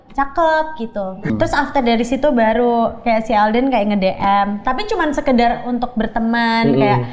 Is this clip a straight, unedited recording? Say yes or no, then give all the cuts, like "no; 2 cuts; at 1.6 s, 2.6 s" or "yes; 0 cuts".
no; 1 cut; at 1.3 s